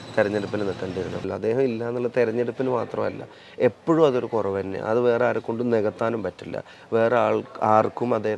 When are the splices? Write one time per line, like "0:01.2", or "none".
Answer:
0:01.2